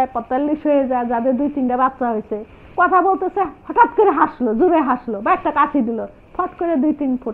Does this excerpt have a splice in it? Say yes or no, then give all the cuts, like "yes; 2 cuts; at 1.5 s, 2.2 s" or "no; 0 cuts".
no; 0 cuts